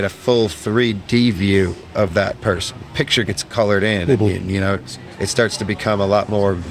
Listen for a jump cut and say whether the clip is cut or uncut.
cut